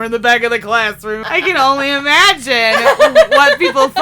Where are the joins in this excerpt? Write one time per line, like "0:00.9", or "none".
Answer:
0:01.2